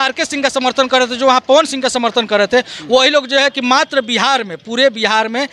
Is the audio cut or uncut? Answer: uncut